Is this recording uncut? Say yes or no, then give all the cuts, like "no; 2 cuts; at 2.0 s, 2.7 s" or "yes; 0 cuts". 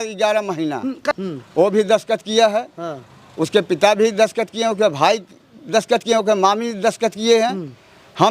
no; 1 cut; at 1.1 s